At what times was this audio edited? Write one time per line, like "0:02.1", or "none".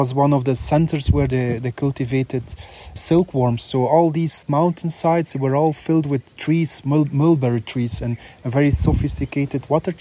0:03.0